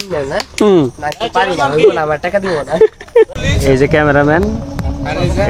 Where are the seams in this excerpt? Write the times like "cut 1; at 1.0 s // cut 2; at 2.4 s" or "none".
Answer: cut 1; at 3.4 s